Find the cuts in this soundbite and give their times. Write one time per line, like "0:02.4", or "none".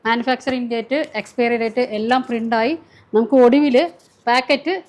none